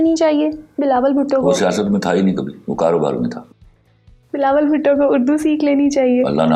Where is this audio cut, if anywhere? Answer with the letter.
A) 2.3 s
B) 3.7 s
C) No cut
C